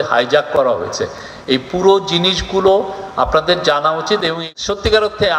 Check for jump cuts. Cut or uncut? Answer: cut